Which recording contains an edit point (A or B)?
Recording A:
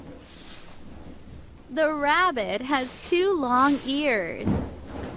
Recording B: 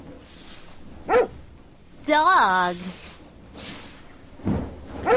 A